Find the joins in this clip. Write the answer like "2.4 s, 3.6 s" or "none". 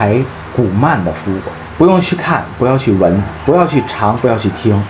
1.6 s